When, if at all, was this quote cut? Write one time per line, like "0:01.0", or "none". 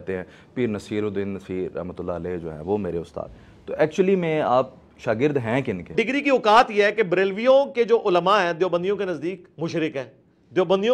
0:05.9
0:09.5